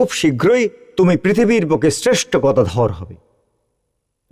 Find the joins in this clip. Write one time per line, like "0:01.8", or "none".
none